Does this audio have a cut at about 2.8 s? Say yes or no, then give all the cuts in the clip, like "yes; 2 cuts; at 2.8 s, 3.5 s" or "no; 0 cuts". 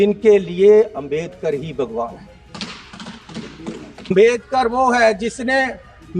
no; 1 cut; at 4.1 s